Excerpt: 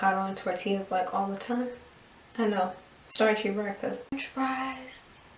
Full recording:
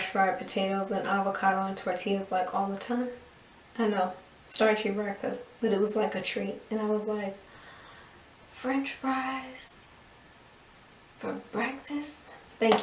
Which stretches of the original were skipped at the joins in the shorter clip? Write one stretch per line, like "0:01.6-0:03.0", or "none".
0:05.6-0:08.8